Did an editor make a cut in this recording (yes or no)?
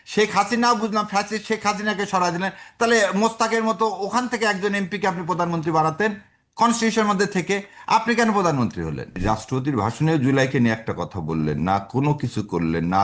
yes